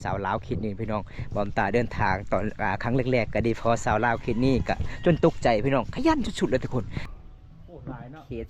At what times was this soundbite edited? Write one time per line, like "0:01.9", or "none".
0:07.1